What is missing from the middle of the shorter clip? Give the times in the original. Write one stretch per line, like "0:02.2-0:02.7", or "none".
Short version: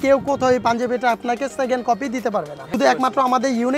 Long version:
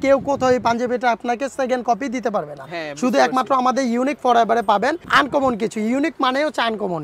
0:02.7-0:03.1